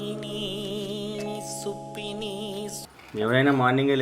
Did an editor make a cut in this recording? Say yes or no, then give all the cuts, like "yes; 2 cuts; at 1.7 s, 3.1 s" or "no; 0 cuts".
yes; 1 cut; at 2.8 s